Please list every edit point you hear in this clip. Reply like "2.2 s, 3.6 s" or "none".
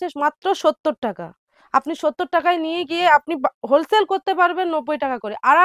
none